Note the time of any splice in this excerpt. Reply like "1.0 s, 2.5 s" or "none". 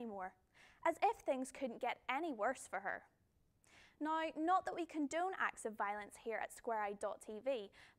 1.2 s